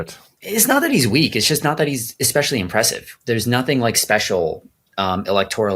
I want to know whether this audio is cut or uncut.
uncut